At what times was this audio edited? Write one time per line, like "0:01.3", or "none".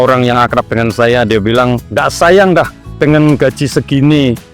0:01.8